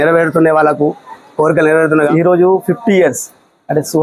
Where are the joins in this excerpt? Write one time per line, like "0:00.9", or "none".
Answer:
0:02.1